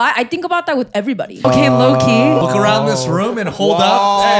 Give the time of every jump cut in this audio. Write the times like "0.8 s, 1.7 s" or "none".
1.4 s, 2.4 s